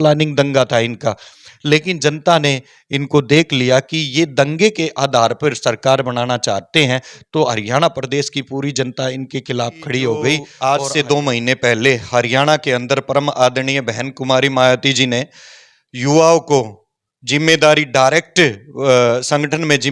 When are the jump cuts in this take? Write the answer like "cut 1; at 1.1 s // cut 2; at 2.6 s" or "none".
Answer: cut 1; at 10.5 s